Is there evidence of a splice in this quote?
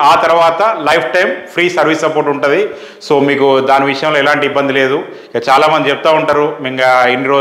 no; 0 cuts

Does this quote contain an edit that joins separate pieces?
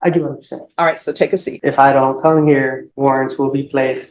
yes; 2 cuts; at 1.5 s, 2.8 s

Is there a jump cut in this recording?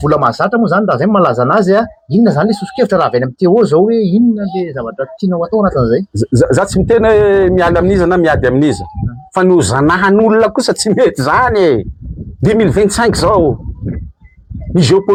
no; 0 cuts

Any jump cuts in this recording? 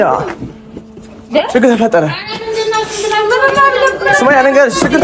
no; 0 cuts

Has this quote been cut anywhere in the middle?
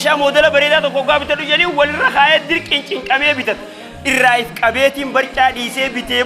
no; 0 cuts

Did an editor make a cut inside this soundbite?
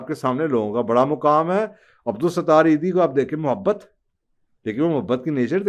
no; 0 cuts

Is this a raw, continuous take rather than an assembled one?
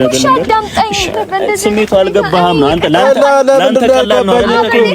no; 1 cut; at 1.1 s

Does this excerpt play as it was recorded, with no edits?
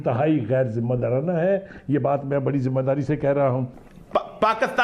no; 1 cut; at 3.7 s

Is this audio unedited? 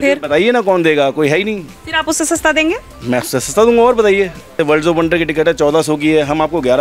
no; 1 cut; at 4.6 s

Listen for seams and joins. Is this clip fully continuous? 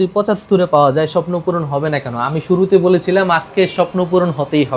yes; 0 cuts

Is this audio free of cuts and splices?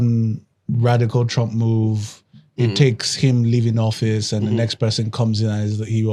yes; 0 cuts

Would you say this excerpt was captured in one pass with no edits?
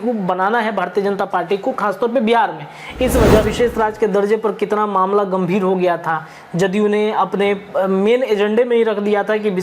no; 1 cut; at 3.5 s

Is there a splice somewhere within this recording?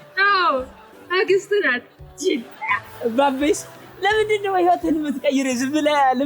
yes; 1 cut; at 2.5 s

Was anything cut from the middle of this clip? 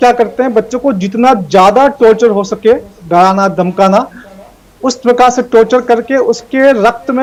no; 0 cuts

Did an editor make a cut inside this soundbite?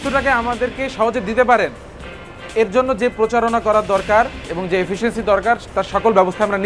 no; 0 cuts

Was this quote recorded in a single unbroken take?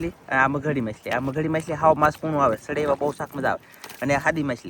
yes; 0 cuts

